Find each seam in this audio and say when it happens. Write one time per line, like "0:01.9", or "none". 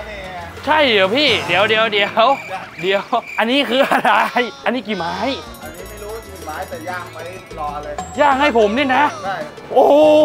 none